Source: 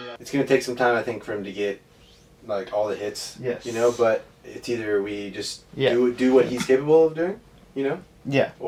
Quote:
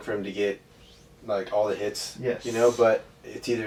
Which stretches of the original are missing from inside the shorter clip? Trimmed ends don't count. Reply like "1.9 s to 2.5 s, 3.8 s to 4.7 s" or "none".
none